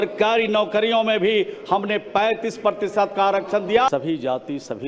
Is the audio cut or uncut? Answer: cut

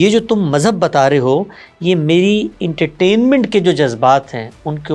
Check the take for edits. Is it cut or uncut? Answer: uncut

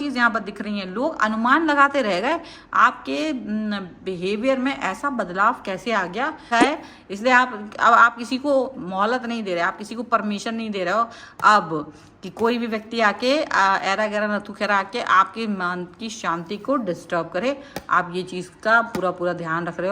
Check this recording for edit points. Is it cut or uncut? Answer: cut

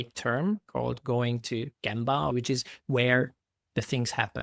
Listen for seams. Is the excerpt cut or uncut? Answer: cut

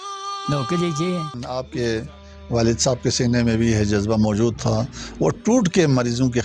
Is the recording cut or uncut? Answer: cut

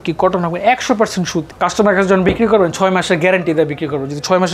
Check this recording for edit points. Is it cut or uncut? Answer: cut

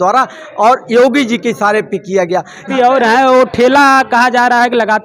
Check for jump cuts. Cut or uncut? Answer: cut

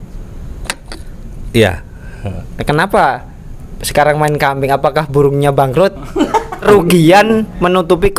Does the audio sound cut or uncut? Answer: cut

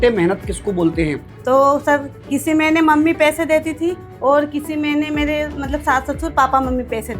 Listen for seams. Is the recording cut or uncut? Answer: cut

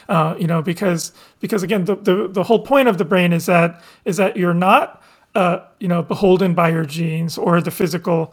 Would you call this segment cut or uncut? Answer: uncut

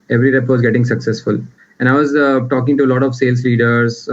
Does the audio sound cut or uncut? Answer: cut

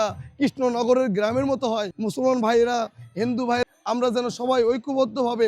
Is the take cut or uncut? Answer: cut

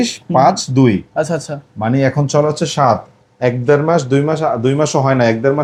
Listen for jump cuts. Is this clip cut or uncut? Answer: uncut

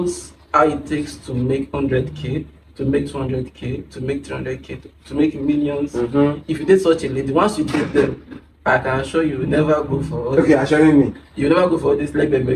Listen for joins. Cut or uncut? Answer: uncut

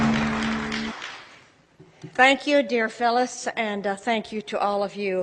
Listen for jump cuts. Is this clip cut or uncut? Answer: cut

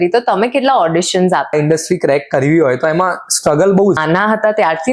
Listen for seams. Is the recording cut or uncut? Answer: cut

